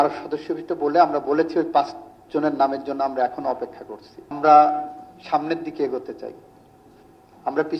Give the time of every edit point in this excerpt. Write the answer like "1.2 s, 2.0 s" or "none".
4.4 s